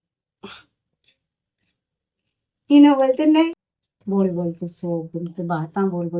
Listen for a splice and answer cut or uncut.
cut